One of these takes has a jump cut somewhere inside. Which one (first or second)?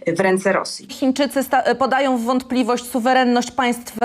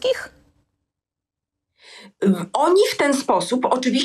first